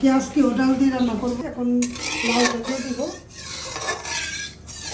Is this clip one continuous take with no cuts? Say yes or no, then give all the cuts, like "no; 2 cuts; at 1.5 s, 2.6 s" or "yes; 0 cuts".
no; 1 cut; at 1.4 s